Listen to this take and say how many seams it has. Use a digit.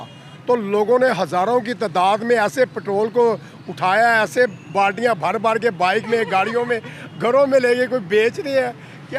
0